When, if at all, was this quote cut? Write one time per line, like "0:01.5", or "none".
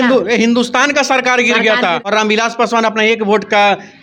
0:02.0